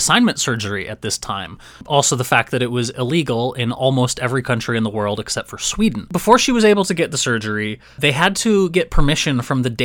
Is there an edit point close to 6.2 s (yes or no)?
yes